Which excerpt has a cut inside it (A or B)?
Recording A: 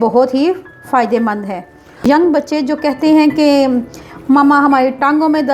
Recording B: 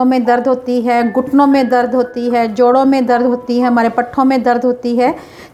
A